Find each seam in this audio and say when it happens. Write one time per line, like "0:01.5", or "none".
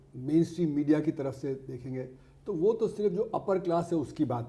none